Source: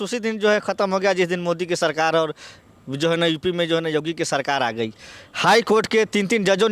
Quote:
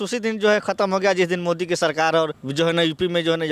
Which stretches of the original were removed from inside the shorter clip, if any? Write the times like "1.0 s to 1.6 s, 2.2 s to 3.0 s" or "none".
2.4 s to 2.8 s